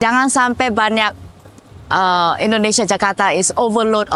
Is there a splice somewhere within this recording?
no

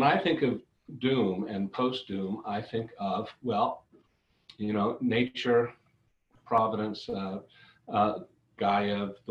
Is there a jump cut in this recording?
no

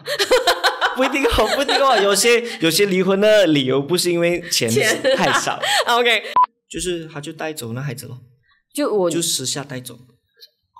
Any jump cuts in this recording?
yes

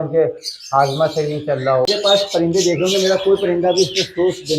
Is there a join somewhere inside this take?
yes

